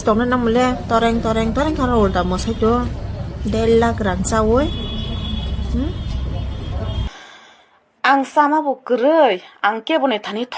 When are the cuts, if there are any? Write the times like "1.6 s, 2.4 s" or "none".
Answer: 7.1 s